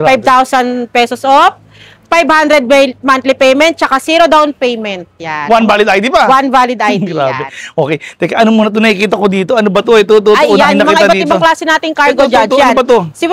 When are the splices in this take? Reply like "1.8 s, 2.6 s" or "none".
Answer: none